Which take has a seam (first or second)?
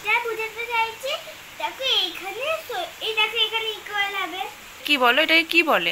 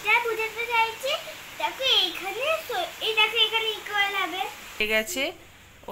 second